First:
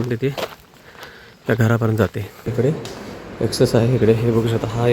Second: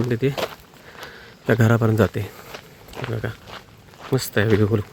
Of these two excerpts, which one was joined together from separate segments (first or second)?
first